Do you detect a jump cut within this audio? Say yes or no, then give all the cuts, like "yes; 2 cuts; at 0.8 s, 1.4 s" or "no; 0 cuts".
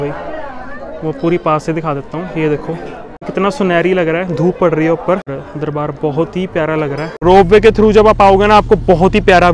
yes; 3 cuts; at 3.3 s, 5.4 s, 7.1 s